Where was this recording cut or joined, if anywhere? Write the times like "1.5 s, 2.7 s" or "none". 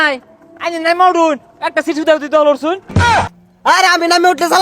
3.1 s